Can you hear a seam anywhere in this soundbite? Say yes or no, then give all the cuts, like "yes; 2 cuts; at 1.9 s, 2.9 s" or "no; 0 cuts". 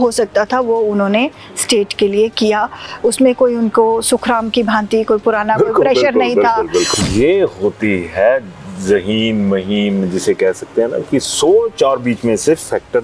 yes; 1 cut; at 6.9 s